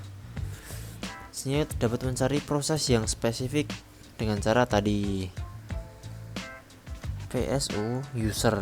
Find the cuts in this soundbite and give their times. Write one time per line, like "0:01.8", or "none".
0:05.5
0:07.2

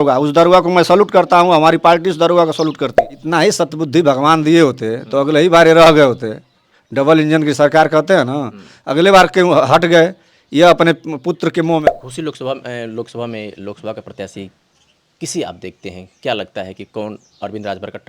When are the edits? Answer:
0:03.1
0:11.8

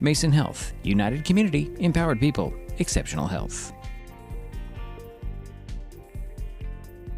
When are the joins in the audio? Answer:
0:03.5

